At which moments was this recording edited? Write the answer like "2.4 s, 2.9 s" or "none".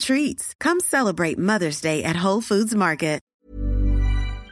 3.3 s